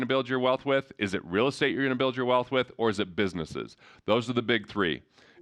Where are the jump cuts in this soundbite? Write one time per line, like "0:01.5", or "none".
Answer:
none

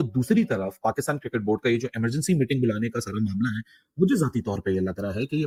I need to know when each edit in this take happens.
none

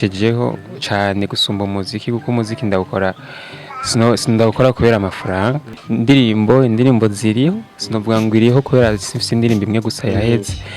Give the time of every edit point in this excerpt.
0:05.7

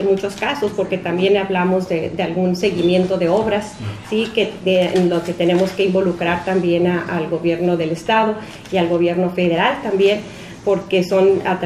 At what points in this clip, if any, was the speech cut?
0:07.2

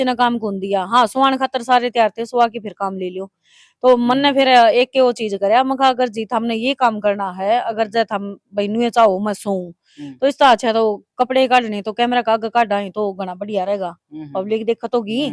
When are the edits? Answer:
none

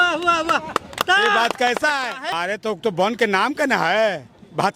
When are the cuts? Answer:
0:02.3

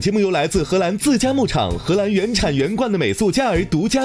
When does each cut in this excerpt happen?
none

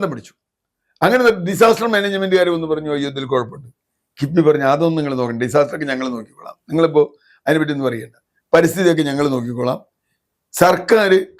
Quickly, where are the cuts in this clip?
none

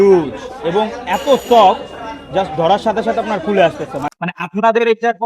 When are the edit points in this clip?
0:04.1

